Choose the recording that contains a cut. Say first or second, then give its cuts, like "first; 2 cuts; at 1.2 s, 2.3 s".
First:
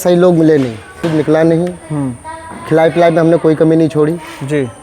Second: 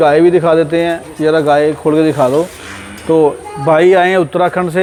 first; 1 cut; at 1.0 s